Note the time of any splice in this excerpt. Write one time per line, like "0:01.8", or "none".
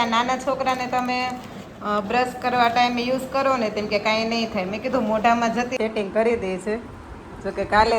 0:05.7